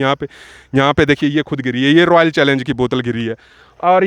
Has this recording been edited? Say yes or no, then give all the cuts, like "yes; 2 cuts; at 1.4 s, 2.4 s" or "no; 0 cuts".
no; 0 cuts